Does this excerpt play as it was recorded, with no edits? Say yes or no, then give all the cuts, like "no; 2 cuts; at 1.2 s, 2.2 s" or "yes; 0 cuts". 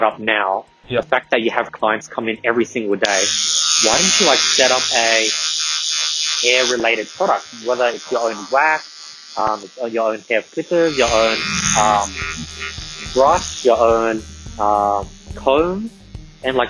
yes; 0 cuts